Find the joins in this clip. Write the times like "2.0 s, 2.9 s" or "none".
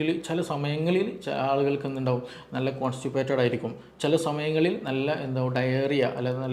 none

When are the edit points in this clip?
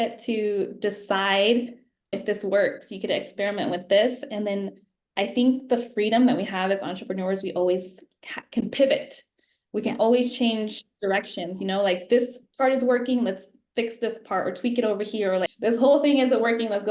2.1 s, 15.5 s

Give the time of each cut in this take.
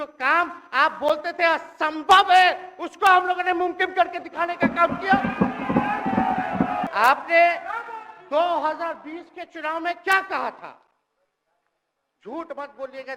6.9 s

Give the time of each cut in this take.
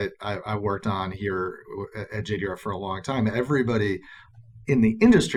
none

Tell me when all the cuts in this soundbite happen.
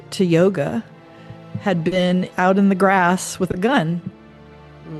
none

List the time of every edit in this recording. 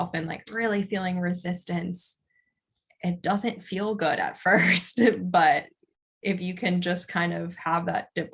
none

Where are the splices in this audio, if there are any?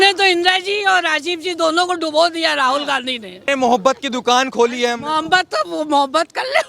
3.5 s

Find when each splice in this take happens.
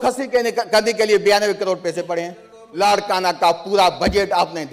2.6 s

